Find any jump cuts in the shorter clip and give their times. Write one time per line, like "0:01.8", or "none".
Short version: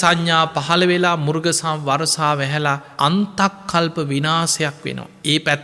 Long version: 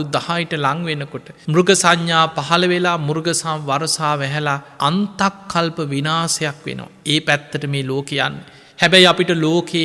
none